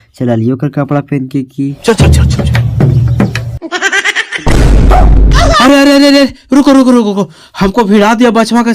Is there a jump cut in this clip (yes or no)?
yes